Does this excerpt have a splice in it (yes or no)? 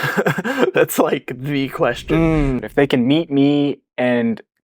yes